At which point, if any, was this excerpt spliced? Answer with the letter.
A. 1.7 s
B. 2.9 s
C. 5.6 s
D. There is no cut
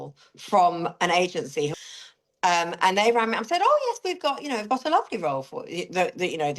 A